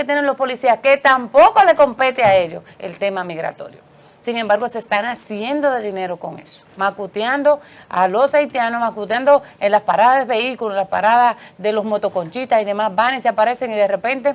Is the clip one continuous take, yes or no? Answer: yes